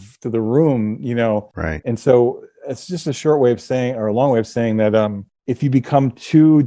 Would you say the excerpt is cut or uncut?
uncut